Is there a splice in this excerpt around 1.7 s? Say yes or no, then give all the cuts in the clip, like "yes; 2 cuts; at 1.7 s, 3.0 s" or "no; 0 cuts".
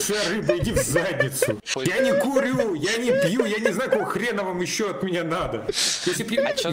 yes; 1 cut; at 1.7 s